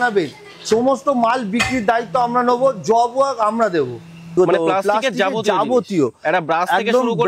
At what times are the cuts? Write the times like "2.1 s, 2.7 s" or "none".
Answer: 4.4 s